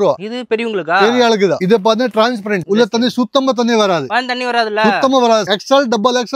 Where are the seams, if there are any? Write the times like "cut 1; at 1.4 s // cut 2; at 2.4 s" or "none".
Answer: cut 1; at 1.6 s // cut 2; at 5.4 s